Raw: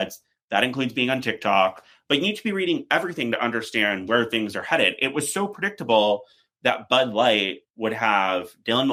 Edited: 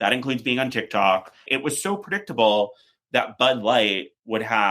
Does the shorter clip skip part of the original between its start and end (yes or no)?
yes